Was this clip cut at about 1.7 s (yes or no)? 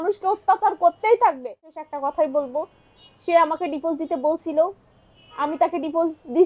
yes